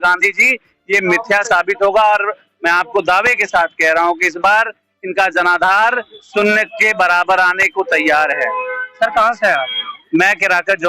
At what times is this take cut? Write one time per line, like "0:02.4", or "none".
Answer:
none